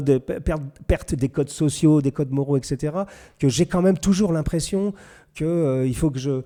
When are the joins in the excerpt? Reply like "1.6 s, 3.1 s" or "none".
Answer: none